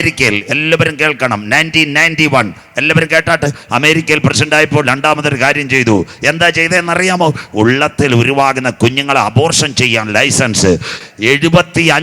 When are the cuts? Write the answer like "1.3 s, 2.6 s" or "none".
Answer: 3.6 s, 11.0 s